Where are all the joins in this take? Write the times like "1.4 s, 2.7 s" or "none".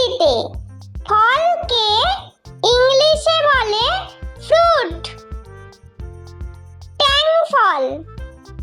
5.0 s, 6.8 s